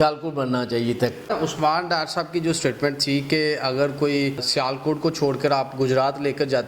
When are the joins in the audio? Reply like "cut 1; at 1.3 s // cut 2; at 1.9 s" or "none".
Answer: cut 1; at 1.3 s // cut 2; at 4.5 s